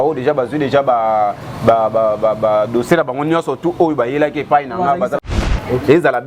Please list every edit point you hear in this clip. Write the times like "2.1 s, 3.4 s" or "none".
5.2 s